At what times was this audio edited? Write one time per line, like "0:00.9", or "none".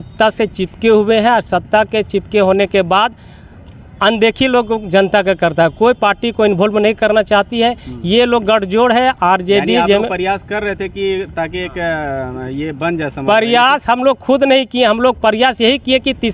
none